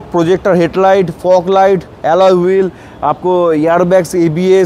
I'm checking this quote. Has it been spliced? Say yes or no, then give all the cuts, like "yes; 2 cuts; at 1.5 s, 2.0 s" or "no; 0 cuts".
no; 0 cuts